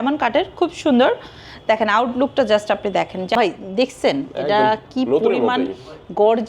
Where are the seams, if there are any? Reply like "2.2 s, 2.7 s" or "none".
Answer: 3.4 s